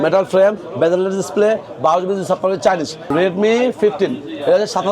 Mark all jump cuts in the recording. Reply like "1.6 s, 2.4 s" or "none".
3.0 s